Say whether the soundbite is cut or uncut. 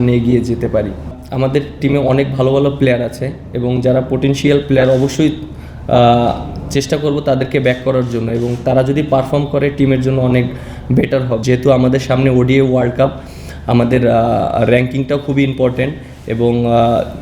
cut